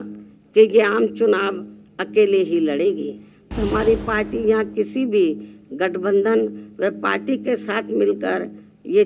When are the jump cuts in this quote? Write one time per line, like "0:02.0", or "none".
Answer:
0:03.5